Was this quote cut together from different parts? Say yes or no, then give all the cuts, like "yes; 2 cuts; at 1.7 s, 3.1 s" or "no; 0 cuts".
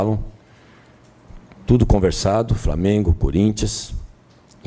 no; 0 cuts